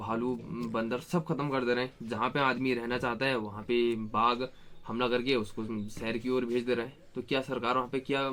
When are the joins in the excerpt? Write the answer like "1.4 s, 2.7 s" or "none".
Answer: none